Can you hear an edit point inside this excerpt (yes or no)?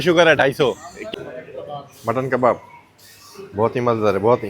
yes